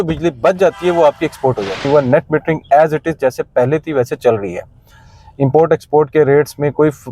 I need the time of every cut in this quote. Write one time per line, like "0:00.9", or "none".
0:01.8